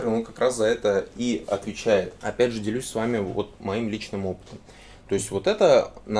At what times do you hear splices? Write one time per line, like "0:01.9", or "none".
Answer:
0:02.2